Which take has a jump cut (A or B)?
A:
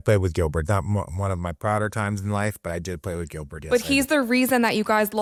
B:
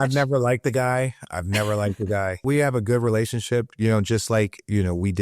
B